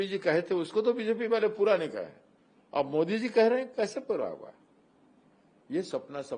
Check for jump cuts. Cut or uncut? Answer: uncut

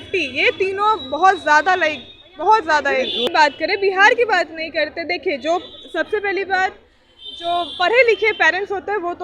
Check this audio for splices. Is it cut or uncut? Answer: cut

